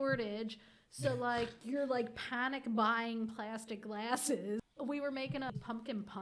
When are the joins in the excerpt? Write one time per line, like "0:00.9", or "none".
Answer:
0:04.7
0:05.5

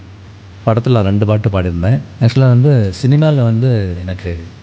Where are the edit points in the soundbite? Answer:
0:02.1

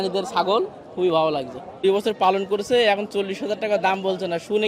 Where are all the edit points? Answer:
0:01.8

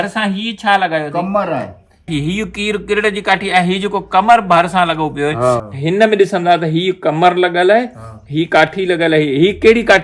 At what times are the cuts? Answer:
0:02.1
0:05.7

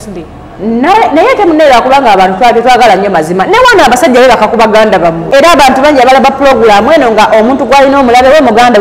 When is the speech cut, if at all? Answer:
0:05.2

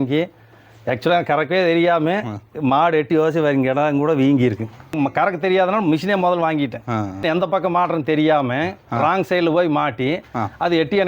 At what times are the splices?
0:04.9
0:07.2

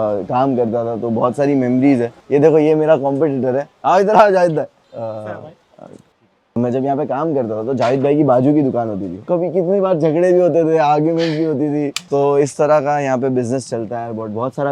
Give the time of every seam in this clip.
0:02.2
0:04.8
0:06.6
0:09.2
0:12.0

